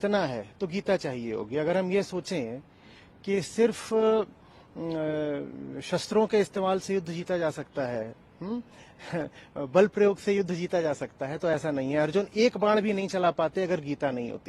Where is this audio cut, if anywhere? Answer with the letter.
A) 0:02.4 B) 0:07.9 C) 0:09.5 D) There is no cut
D